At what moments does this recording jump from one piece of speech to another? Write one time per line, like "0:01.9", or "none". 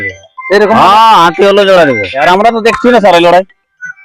0:02.2